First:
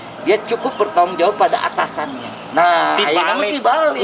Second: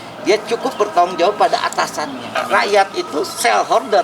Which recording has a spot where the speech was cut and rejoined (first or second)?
second